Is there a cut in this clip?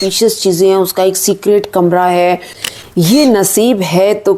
yes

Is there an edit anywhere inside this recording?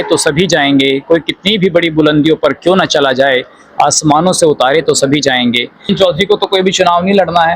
yes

